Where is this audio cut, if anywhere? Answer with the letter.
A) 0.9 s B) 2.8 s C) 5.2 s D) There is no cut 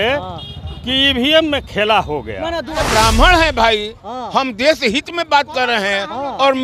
B